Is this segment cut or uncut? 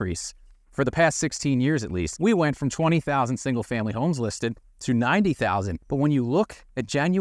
cut